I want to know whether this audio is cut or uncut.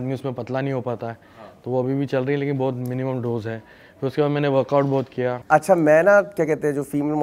cut